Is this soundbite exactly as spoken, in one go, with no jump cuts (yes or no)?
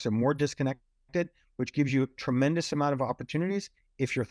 yes